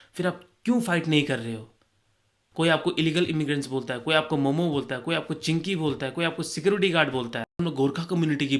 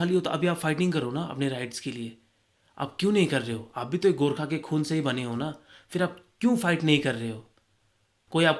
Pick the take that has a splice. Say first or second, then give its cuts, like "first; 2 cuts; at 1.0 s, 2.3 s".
first; 1 cut; at 7.6 s